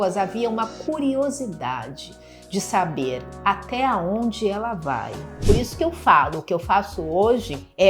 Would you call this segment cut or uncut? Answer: cut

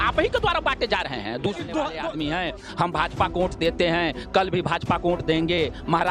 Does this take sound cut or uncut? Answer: cut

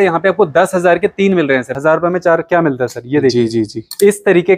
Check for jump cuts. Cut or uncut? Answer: cut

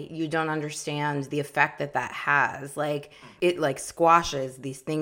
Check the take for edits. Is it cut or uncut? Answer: uncut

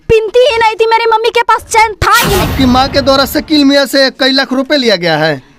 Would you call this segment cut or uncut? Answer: cut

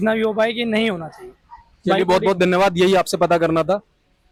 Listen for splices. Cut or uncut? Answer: uncut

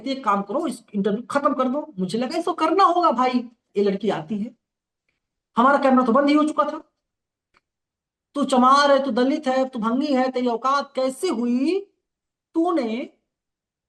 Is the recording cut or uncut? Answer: cut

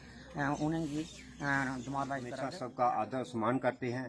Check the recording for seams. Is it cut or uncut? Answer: cut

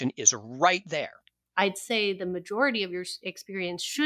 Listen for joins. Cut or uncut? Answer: cut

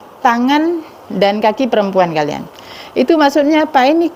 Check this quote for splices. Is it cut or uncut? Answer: uncut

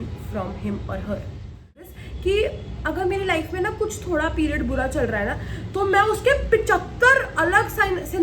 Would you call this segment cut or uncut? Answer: cut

